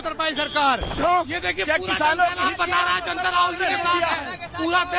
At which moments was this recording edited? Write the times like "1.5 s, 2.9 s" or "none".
1.0 s